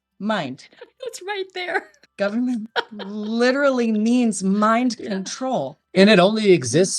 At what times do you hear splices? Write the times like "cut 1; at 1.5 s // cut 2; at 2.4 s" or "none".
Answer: none